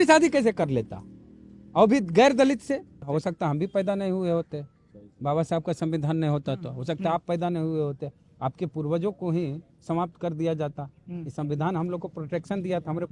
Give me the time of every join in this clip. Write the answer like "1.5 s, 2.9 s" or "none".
3.1 s